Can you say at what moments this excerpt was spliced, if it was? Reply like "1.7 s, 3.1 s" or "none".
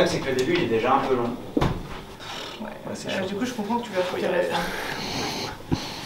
2.2 s